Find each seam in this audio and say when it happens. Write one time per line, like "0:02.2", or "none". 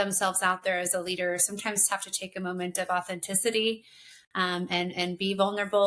none